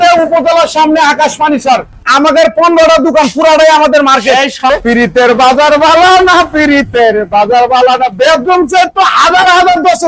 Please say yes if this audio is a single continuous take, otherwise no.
no